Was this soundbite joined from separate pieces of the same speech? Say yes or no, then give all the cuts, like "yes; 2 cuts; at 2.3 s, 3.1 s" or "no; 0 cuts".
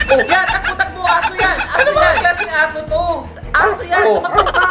no; 0 cuts